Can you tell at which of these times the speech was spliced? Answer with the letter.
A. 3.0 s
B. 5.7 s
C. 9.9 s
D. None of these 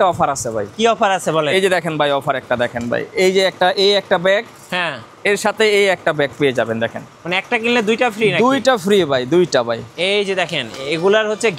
C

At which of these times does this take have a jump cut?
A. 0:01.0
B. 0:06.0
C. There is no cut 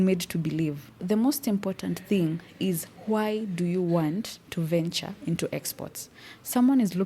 A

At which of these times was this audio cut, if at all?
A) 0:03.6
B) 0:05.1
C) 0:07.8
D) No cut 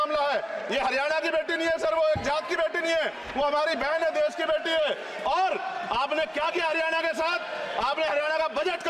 D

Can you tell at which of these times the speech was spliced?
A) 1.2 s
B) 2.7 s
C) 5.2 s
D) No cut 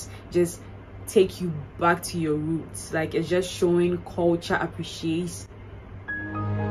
D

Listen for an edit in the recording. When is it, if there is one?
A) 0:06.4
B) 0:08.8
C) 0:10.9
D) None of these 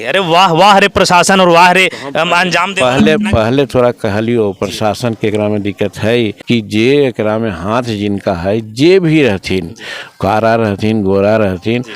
A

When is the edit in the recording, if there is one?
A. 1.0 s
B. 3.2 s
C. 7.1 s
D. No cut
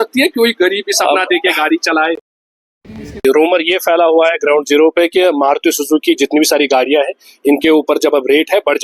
B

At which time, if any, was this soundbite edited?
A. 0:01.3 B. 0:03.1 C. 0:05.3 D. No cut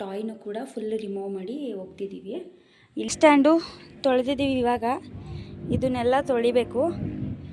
B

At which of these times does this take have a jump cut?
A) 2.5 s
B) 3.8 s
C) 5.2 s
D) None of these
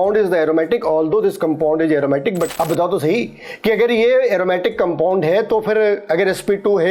A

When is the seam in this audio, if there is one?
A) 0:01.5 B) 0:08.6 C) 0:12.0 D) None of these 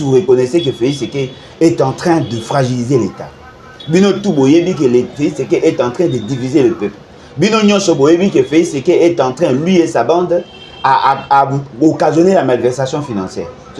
D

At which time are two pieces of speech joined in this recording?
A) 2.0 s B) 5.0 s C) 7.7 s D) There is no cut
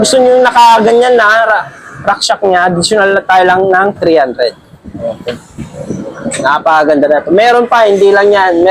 D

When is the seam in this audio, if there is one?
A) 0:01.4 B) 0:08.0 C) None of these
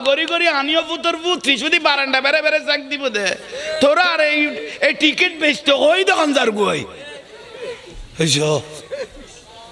C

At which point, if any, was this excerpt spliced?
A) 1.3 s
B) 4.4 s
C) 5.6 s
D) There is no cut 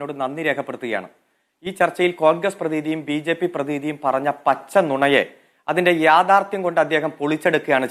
D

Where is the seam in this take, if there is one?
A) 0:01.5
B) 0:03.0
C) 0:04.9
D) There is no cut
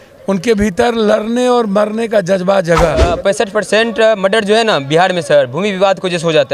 B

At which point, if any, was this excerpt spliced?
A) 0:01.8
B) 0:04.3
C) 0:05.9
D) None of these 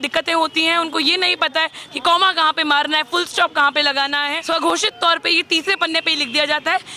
B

